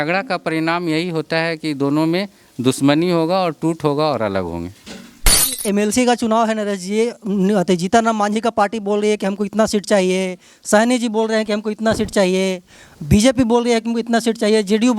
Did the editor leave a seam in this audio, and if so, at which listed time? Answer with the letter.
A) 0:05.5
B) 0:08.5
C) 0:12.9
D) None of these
A